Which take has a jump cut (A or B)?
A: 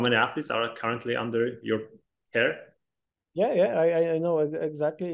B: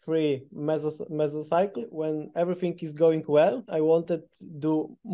B